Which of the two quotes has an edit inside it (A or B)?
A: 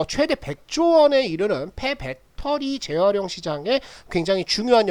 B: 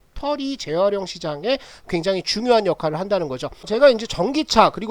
B